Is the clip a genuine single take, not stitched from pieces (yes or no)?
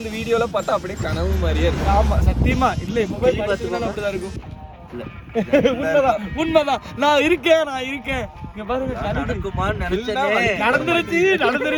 yes